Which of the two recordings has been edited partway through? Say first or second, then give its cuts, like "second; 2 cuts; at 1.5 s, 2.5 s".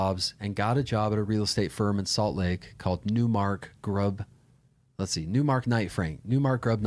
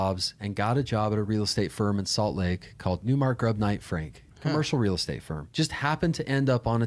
second; 2 cuts; at 3.0 s, 5.3 s